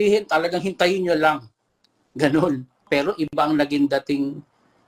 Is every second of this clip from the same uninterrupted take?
no; 1 cut; at 2.9 s

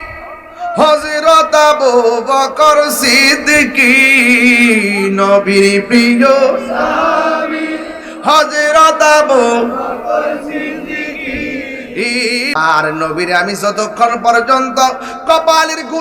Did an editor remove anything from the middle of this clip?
yes; 1 cut; at 12.5 s

